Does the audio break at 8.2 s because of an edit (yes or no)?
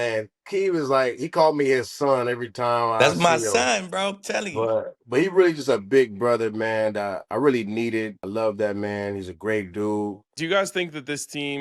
yes